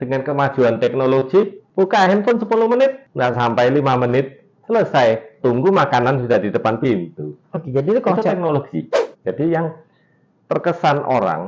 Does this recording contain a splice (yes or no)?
yes